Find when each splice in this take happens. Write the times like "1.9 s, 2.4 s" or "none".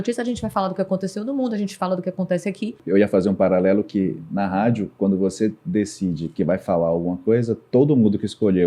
2.8 s